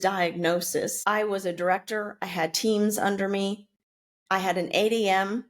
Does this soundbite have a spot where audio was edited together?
yes; 1 cut; at 1.0 s

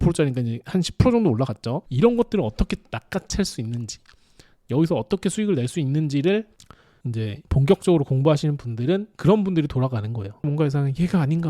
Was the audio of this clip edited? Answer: yes; 1 cut; at 10.4 s

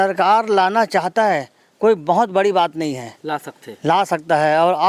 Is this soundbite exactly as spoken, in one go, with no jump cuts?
yes; 0 cuts

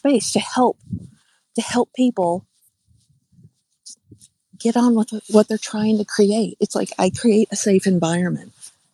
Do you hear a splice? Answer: no; 0 cuts

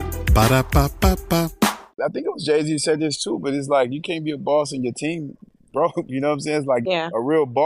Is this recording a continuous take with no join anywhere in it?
no; 1 cut; at 2.0 s

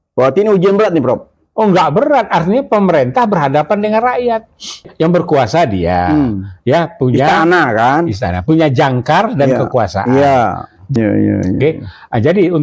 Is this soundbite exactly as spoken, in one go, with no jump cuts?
no; 2 cuts; at 4.9 s, 10.7 s

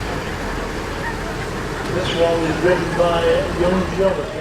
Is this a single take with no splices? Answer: yes; 0 cuts

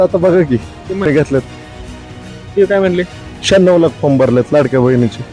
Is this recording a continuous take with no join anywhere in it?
no; 1 cut; at 1.1 s

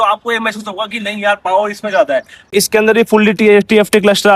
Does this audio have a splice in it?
yes; 1 cut; at 2.4 s

